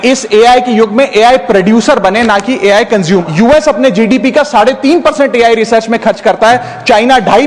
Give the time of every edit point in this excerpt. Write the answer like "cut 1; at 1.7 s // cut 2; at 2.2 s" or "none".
cut 1; at 3.2 s